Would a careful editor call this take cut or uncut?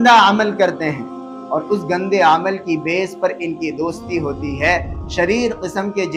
uncut